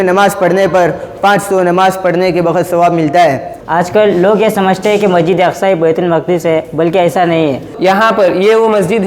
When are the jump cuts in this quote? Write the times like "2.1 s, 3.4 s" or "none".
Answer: 3.5 s, 7.7 s